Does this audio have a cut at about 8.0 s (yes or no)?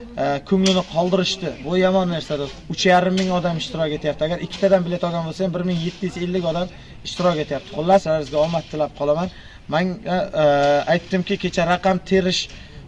yes